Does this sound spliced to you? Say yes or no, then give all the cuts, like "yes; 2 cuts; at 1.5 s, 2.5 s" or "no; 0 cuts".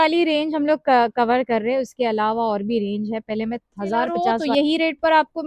yes; 1 cut; at 4.4 s